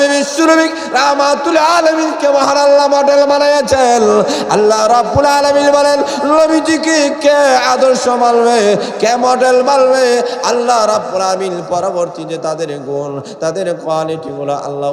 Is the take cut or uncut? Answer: uncut